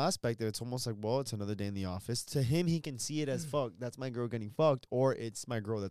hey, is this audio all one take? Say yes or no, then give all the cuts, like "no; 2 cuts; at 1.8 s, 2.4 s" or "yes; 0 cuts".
yes; 0 cuts